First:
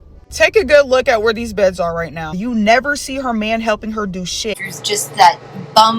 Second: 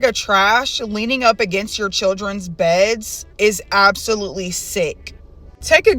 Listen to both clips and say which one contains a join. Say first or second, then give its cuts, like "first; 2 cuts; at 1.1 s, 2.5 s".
first; 2 cuts; at 2.3 s, 4.7 s